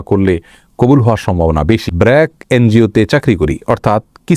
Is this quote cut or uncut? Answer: cut